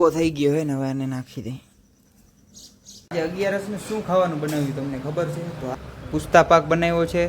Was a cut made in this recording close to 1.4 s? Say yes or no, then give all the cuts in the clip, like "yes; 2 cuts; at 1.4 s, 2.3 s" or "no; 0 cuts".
no; 2 cuts; at 3.1 s, 5.7 s